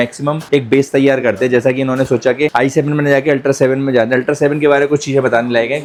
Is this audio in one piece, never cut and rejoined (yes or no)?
yes